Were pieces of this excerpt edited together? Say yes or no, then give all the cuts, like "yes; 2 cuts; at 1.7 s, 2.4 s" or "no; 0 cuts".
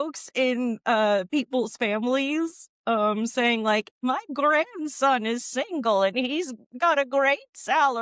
no; 0 cuts